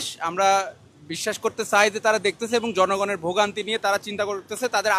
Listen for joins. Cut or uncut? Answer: uncut